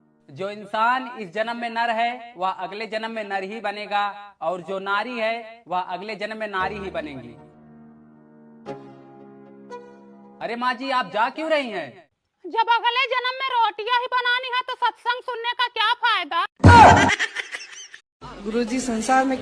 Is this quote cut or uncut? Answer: cut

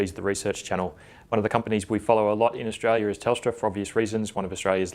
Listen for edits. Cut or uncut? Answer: cut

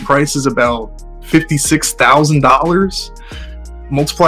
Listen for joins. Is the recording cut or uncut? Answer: uncut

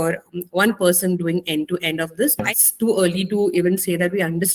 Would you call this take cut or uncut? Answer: cut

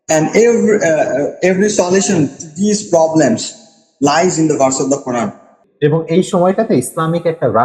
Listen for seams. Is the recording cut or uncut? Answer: cut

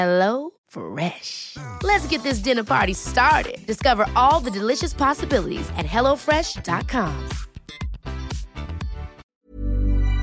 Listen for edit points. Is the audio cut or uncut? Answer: cut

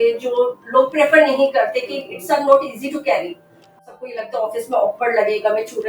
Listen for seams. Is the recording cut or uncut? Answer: cut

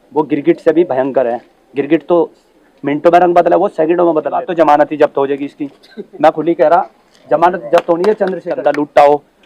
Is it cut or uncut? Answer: cut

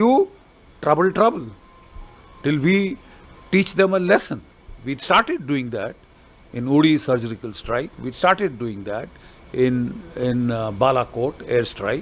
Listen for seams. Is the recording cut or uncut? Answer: uncut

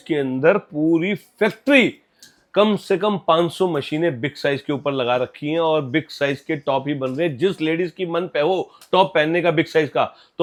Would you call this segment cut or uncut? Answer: uncut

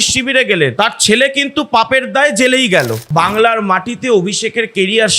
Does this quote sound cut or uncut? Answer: cut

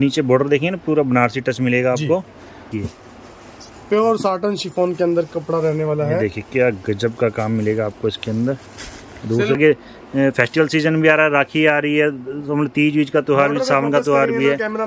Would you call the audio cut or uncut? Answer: cut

